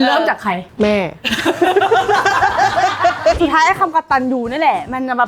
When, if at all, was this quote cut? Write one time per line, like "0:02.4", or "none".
0:03.4